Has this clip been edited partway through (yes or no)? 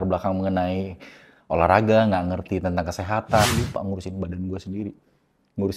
yes